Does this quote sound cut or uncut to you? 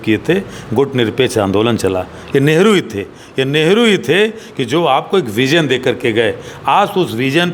uncut